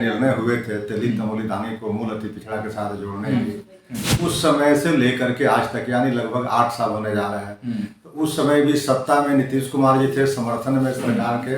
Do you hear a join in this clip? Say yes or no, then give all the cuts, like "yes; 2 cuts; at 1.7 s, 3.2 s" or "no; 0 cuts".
no; 0 cuts